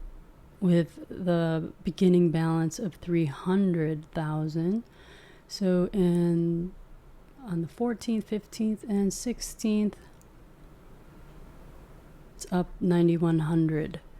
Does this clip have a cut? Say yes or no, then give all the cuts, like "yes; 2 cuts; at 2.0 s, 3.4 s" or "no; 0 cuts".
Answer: yes; 1 cut; at 12.4 s